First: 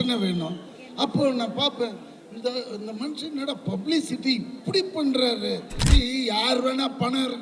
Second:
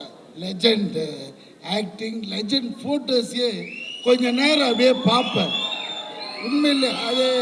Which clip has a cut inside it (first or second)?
first